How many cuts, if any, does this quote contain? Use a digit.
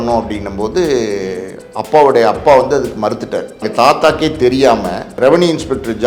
2